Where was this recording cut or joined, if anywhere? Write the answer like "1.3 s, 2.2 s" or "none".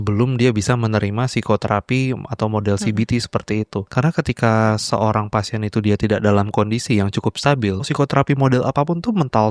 3.8 s, 7.9 s